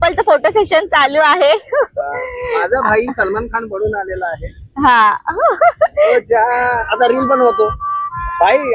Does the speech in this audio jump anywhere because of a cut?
no; 0 cuts

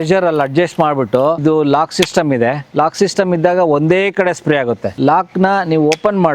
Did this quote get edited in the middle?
yes; 3 cuts; at 1.4 s, 2.6 s, 4.9 s

